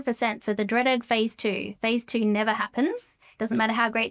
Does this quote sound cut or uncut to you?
uncut